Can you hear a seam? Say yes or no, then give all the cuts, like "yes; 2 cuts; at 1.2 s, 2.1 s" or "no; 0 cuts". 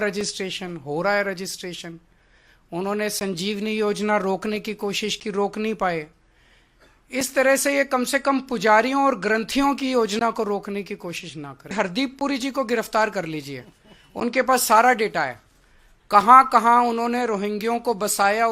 yes; 1 cut; at 11.7 s